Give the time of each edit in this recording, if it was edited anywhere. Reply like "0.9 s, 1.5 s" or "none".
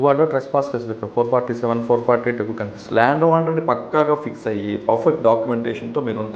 2.7 s